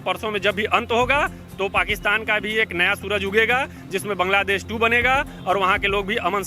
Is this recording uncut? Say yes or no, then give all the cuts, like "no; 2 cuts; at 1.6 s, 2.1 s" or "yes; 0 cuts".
yes; 0 cuts